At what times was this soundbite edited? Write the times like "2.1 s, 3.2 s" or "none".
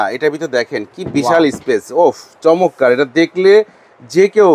none